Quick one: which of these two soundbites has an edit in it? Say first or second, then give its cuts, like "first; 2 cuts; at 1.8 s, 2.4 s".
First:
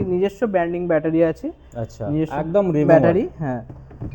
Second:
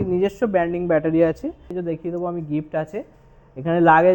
second; 1 cut; at 1.7 s